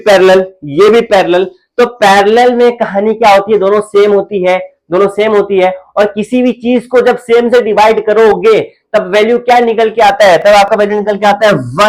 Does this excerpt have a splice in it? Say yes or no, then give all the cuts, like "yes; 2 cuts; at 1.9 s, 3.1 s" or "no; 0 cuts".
no; 0 cuts